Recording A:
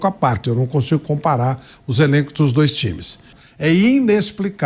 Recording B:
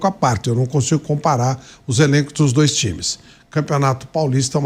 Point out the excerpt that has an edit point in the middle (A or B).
A